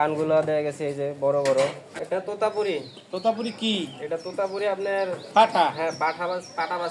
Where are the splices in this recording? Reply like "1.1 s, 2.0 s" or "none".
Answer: 1.9 s